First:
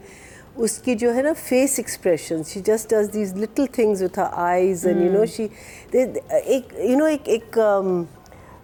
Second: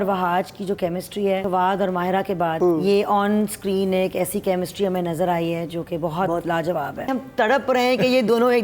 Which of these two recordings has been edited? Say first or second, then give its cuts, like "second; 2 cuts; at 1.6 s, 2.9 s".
second; 3 cuts; at 1.4 s, 2.6 s, 7.1 s